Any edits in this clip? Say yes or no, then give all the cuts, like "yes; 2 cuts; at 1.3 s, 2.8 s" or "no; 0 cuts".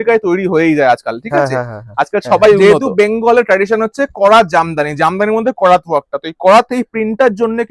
yes; 1 cut; at 2.6 s